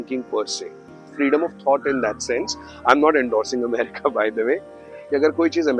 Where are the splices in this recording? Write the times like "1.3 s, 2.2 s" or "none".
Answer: 1.0 s, 4.9 s